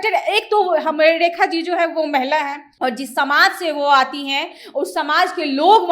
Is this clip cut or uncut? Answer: cut